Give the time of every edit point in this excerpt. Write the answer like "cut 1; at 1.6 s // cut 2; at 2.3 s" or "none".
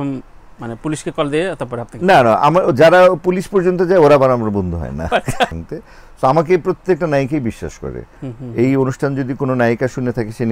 cut 1; at 5.5 s